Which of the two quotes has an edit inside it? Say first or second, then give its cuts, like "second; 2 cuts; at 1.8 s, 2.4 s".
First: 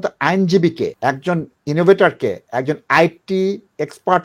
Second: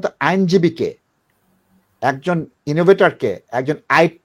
first; 1 cut; at 1.0 s